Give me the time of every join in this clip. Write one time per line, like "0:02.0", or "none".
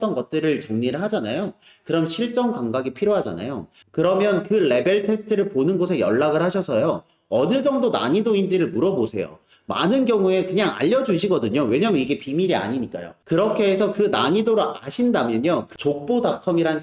0:15.7